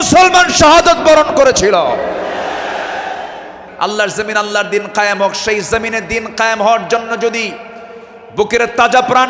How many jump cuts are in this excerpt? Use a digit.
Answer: 1